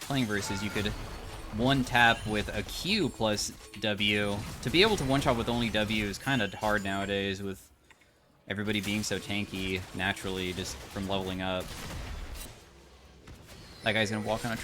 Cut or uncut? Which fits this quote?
cut